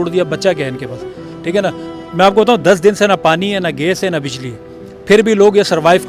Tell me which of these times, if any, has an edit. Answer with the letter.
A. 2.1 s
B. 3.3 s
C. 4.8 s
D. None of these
D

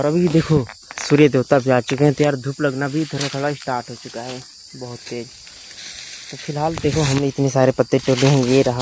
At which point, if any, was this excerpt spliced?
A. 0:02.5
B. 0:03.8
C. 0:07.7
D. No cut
D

